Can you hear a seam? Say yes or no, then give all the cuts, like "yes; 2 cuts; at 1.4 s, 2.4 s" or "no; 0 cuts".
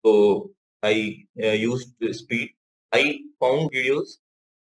yes; 1 cut; at 3.7 s